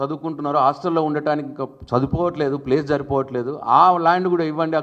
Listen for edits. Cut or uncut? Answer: uncut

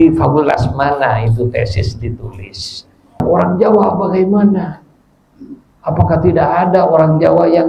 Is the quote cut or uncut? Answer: cut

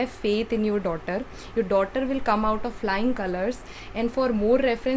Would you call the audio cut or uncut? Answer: uncut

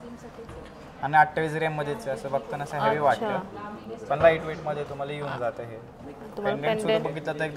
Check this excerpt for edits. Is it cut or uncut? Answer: uncut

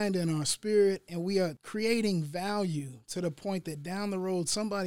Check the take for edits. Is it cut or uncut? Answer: cut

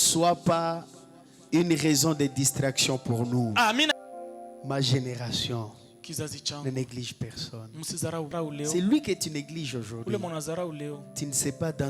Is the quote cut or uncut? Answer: cut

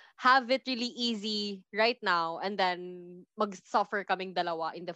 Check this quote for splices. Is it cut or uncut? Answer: uncut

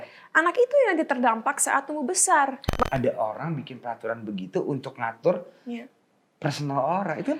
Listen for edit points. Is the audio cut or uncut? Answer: cut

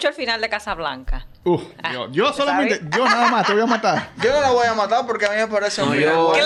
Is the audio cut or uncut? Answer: uncut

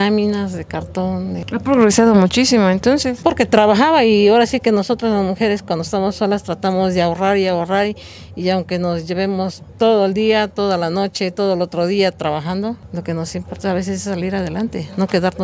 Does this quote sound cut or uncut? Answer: uncut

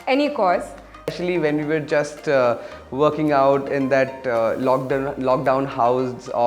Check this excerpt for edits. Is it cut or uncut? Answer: cut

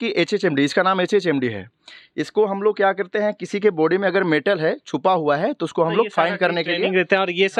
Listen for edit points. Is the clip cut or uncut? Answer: uncut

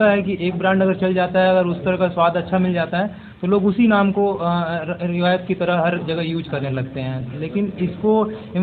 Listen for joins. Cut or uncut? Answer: uncut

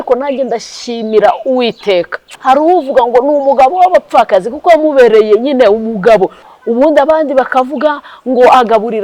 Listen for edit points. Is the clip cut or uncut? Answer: cut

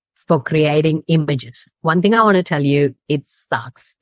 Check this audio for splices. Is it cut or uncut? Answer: uncut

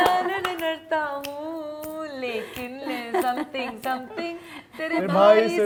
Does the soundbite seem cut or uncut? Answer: uncut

